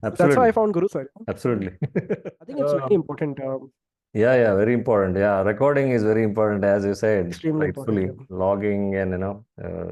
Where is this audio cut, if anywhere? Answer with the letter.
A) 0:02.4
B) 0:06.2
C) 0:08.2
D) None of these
A